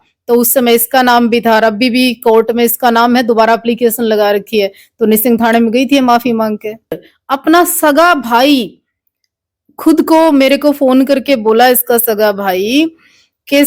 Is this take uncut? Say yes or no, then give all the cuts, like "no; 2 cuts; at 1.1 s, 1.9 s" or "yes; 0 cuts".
no; 1 cut; at 7.1 s